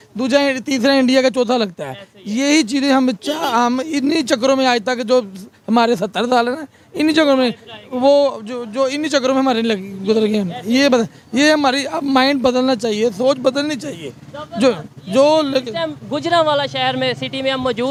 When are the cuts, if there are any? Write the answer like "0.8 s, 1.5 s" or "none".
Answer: none